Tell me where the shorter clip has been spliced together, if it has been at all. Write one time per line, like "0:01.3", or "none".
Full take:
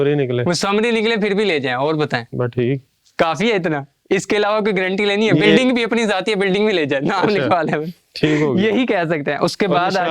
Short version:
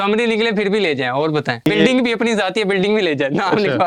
0:01.7